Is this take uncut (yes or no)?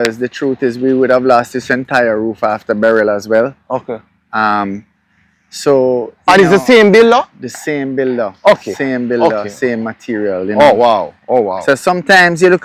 yes